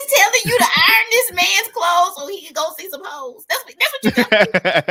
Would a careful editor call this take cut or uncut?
uncut